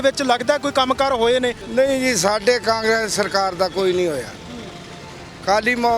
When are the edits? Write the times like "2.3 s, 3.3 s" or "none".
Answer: 1.6 s

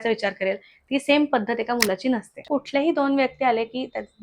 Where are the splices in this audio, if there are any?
2.4 s

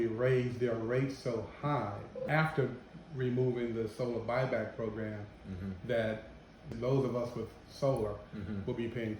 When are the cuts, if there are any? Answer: 2.3 s, 6.7 s

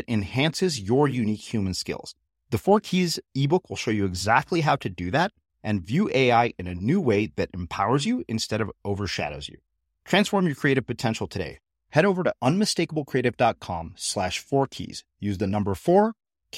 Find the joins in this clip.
none

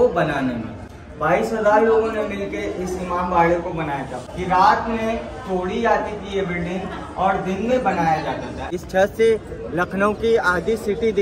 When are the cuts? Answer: 4.1 s, 8.6 s

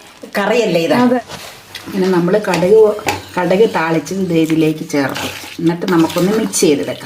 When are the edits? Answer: 1.2 s

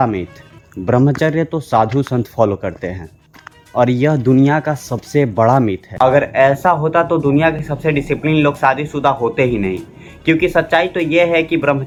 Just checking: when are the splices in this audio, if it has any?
none

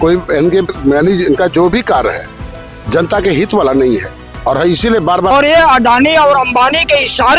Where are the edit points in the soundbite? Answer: 5.3 s

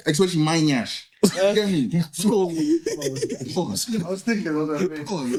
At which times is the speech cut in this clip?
none

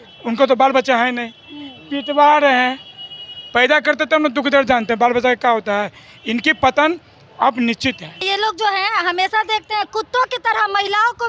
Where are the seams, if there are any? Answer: 8.2 s

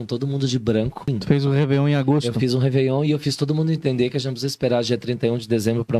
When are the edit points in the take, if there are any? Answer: 1.1 s

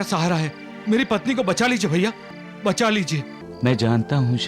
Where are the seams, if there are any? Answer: 3.4 s

